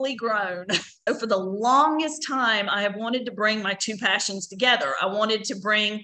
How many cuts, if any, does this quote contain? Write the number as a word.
one